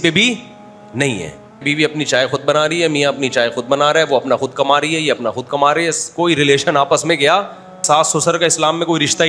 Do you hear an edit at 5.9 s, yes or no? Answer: no